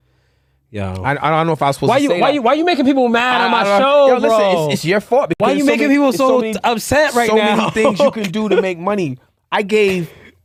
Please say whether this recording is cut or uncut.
uncut